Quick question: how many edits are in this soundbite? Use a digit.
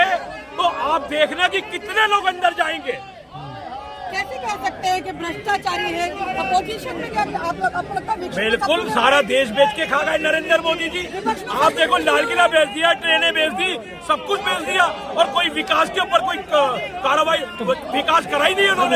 0